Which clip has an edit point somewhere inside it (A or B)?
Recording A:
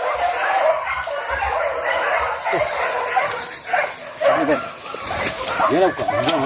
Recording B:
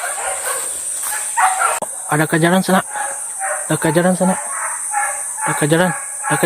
B